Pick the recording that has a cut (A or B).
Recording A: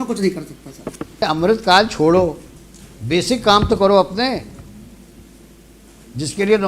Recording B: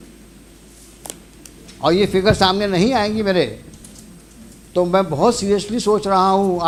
A